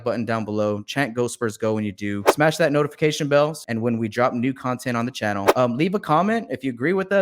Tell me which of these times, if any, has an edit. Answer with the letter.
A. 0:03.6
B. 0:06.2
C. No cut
A